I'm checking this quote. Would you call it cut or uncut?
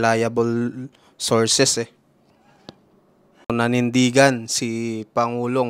cut